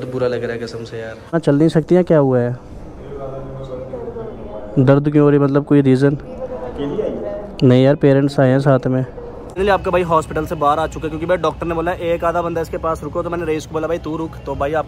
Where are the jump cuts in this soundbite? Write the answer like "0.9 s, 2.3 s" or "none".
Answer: 1.3 s, 9.6 s